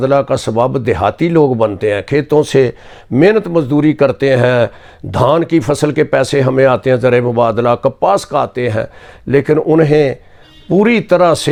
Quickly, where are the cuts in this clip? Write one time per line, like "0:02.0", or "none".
none